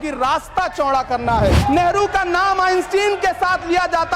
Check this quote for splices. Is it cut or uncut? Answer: cut